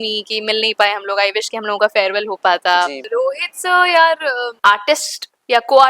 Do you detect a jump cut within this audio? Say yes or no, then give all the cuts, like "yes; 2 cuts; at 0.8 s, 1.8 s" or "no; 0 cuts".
yes; 2 cuts; at 3.0 s, 4.5 s